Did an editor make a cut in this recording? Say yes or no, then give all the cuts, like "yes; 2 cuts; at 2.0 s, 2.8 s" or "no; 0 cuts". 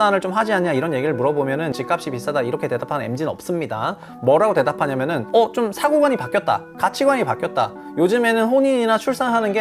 no; 0 cuts